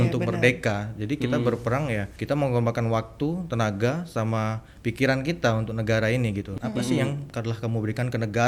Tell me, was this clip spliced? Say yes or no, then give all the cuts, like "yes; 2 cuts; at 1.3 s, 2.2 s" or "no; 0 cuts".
yes; 2 cuts; at 2.1 s, 6.5 s